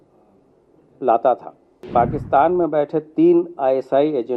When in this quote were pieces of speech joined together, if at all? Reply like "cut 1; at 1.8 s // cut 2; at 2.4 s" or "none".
cut 1; at 1.9 s